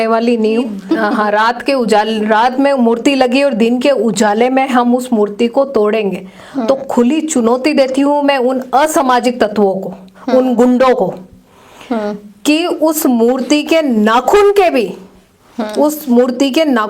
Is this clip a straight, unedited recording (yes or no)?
no